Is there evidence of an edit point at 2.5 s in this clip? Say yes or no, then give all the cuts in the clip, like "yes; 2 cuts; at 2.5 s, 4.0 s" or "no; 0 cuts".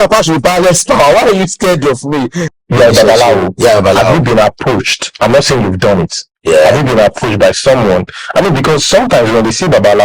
yes; 1 cut; at 2.5 s